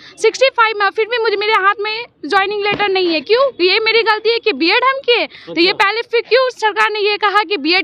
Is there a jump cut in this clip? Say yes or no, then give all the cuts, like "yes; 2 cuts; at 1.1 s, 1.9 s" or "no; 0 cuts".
no; 0 cuts